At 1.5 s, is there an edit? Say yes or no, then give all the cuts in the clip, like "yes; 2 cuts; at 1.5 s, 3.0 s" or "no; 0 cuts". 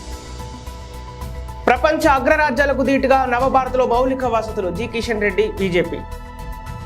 yes; 2 cuts; at 1.5 s, 6.0 s